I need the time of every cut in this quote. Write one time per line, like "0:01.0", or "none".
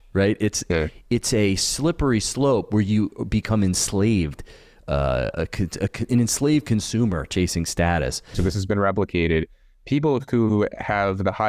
0:08.4